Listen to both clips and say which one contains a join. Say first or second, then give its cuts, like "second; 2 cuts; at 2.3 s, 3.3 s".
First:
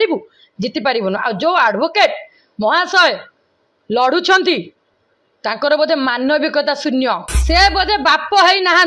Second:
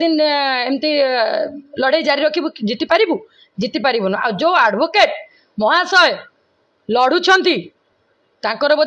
first; 1 cut; at 7.3 s